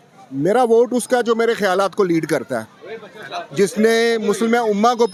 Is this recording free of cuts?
yes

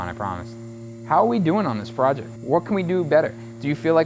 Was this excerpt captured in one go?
no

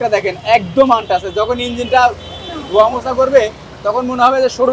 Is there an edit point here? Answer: no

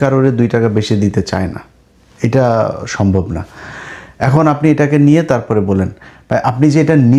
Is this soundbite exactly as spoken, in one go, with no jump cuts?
yes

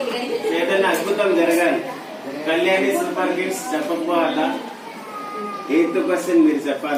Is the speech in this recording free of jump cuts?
yes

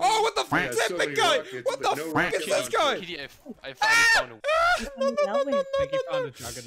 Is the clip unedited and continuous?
yes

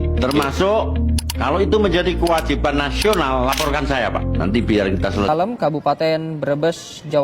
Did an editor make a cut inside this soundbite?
yes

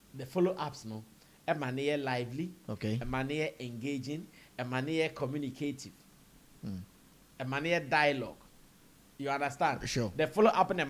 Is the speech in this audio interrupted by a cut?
no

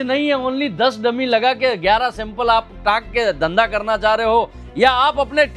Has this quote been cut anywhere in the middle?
no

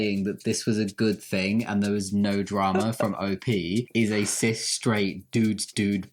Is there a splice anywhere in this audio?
no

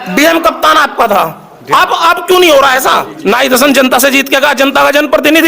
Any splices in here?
yes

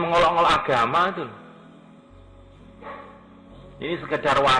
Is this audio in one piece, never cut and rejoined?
yes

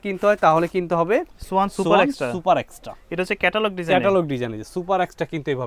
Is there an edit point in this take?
no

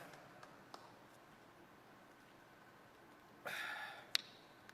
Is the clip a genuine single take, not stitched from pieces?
yes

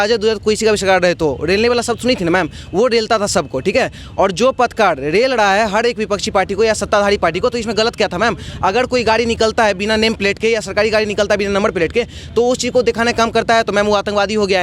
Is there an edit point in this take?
no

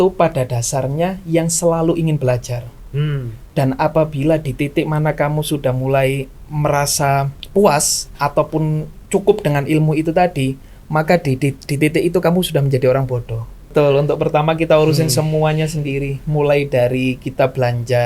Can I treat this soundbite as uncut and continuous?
no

